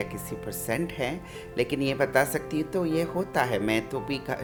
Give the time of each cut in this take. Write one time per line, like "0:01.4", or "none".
none